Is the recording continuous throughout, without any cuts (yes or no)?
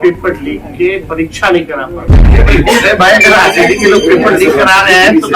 no